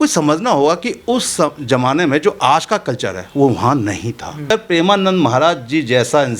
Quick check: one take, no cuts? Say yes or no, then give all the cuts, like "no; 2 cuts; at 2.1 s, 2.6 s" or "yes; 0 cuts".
no; 1 cut; at 4.5 s